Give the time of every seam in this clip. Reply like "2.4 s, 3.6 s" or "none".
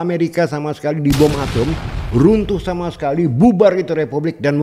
none